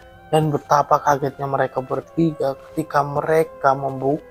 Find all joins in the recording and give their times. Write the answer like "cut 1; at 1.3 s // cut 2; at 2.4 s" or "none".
none